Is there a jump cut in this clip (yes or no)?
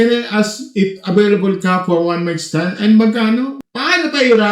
yes